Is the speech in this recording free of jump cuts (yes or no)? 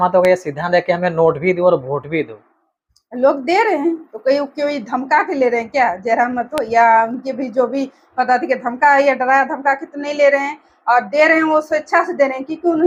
yes